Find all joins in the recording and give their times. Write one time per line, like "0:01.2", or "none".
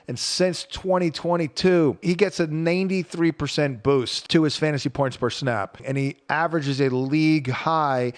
0:02.0
0:04.2
0:05.8